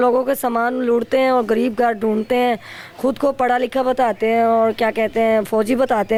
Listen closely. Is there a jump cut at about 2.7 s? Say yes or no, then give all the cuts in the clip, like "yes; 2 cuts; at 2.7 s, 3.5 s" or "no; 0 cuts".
no; 0 cuts